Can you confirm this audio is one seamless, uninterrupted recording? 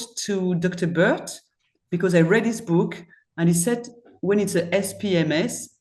yes; 0 cuts

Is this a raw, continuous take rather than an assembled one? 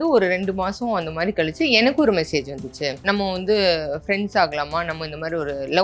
no; 1 cut; at 3.0 s

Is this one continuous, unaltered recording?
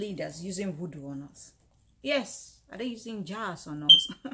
yes; 0 cuts

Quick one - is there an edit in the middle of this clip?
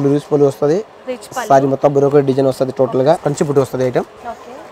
yes; 1 cut; at 3.2 s

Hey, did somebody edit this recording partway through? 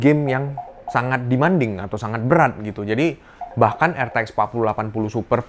no; 0 cuts

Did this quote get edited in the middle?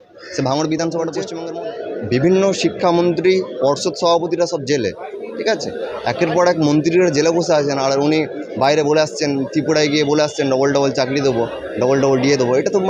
yes; 1 cut; at 1.3 s

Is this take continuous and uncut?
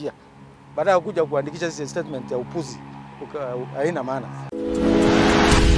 no; 1 cut; at 4.4 s

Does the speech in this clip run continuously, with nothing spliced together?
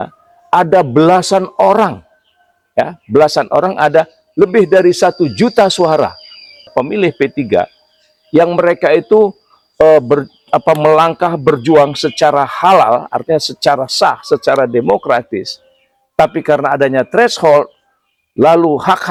yes; 0 cuts

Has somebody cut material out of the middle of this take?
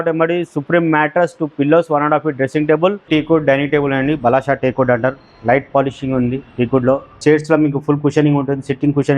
yes; 2 cuts; at 3.0 s, 7.2 s

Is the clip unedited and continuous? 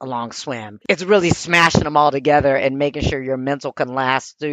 yes; 0 cuts

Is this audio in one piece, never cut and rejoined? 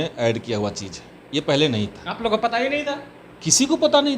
yes; 0 cuts

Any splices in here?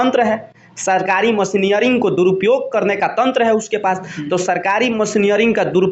no; 0 cuts

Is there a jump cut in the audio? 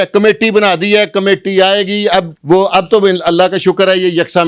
yes; 1 cut; at 2.3 s

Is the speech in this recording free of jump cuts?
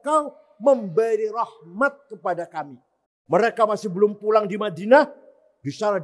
no; 1 cut; at 3.1 s

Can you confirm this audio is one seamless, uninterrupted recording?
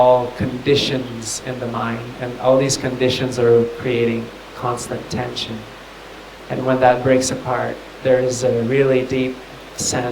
no; 1 cut; at 7.8 s

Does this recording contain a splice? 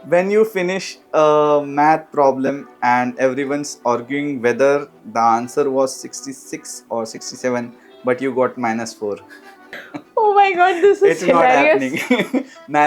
no; 0 cuts

